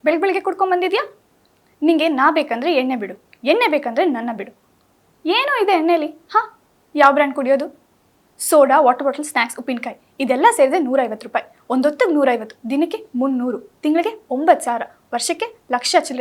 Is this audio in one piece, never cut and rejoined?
yes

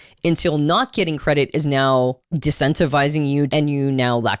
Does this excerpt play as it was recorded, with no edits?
no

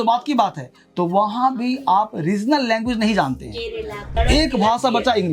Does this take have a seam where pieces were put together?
yes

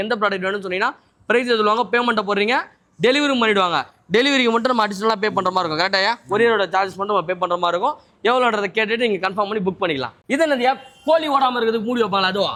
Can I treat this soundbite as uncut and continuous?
yes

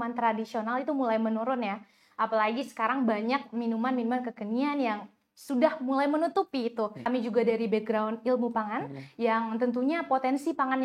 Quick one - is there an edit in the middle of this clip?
yes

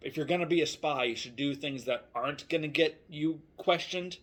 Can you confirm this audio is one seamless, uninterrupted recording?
yes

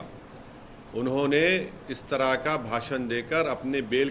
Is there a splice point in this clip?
no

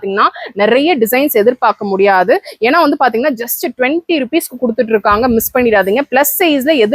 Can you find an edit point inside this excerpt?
no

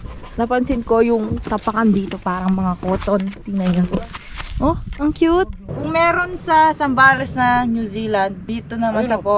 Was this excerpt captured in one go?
no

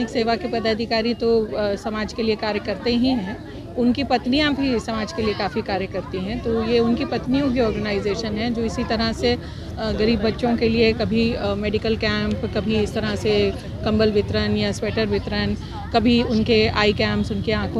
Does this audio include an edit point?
no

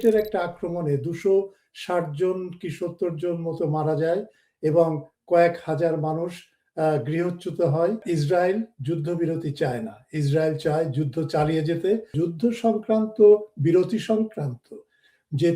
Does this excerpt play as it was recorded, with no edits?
no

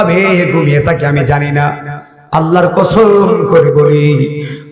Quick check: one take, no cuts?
yes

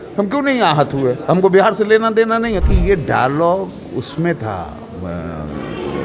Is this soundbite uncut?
no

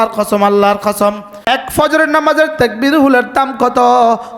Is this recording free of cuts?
no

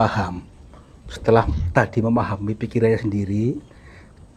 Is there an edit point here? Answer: no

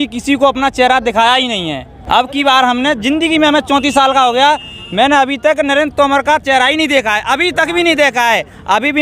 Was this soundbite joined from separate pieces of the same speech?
no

